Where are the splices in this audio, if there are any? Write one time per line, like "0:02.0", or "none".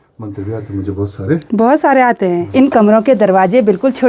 0:02.5